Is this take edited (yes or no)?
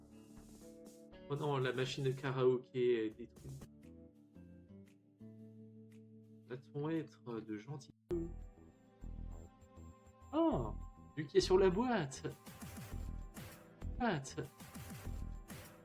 yes